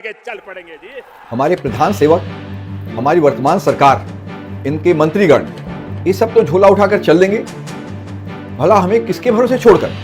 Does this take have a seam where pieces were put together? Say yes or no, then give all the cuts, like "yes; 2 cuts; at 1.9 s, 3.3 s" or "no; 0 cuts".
yes; 1 cut; at 1.2 s